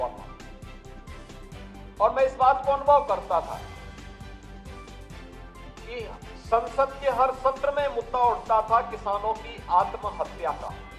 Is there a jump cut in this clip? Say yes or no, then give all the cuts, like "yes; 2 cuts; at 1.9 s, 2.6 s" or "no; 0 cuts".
yes; 2 cuts; at 4.1 s, 5.9 s